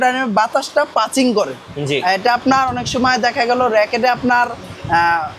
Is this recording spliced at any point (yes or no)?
no